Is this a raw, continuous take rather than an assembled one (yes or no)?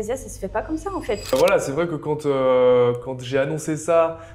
no